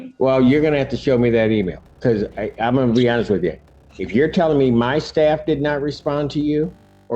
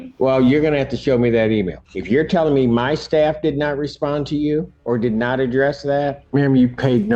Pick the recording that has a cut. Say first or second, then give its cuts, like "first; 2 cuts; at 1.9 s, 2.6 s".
second; 3 cuts; at 1.8 s, 4.7 s, 6.2 s